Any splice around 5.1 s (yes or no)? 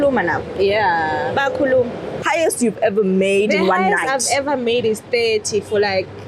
no